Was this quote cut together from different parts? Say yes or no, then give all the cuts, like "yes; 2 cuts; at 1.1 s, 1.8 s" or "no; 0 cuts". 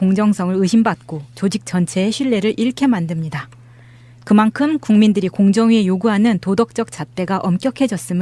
yes; 1 cut; at 1.9 s